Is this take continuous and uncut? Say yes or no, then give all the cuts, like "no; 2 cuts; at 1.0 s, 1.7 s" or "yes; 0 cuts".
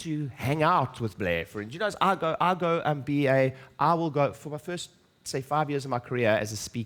yes; 0 cuts